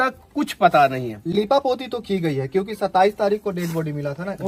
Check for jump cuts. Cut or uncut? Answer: uncut